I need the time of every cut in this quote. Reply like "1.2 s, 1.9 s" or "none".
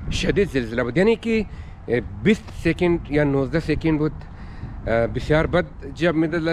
none